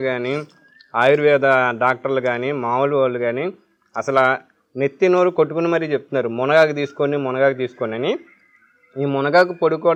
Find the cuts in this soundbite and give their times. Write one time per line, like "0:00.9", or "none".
none